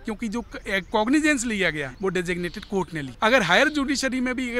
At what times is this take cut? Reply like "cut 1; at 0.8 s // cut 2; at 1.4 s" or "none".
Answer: cut 1; at 1.9 s // cut 2; at 3.1 s